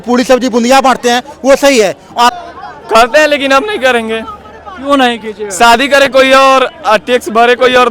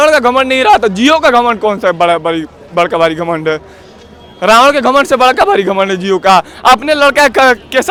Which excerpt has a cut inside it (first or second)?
first